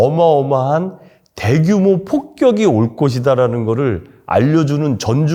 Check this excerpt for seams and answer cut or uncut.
uncut